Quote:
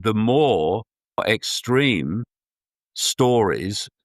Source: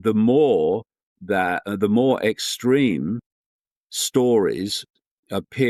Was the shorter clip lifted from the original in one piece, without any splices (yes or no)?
no